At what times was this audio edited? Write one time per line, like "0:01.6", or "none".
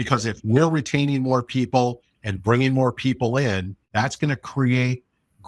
0:03.8